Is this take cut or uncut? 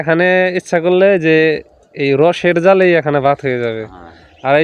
uncut